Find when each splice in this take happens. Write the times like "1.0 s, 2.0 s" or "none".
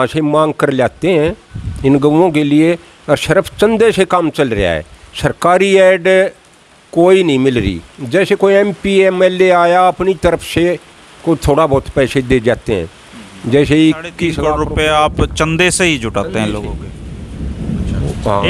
14.4 s